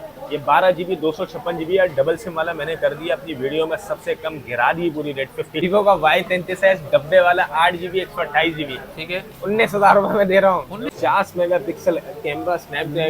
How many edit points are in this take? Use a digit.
2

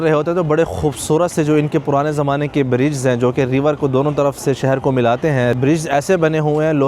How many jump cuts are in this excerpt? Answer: 0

